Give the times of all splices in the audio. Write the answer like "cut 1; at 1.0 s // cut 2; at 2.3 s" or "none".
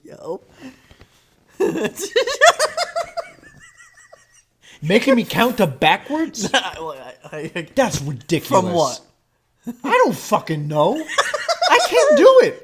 none

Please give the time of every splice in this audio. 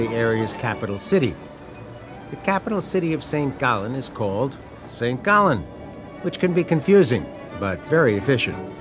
cut 1; at 5.3 s

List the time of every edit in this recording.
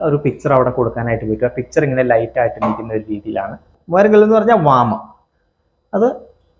cut 1; at 3.7 s

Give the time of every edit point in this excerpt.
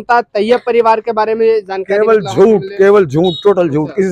none

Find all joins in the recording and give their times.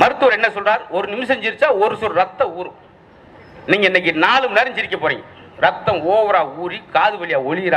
none

